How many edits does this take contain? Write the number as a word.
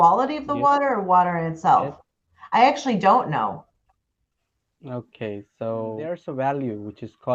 one